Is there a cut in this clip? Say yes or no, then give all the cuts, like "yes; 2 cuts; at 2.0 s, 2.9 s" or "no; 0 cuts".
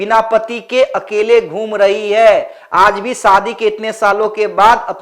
no; 0 cuts